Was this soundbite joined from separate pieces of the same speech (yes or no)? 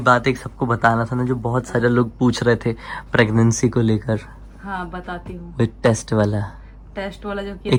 no